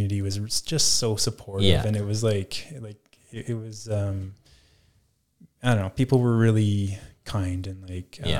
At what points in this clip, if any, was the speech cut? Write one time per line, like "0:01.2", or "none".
none